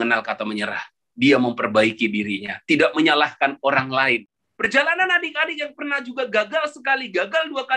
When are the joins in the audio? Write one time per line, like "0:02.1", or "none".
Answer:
0:04.2